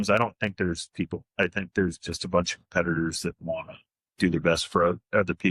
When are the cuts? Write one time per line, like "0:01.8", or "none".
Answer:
none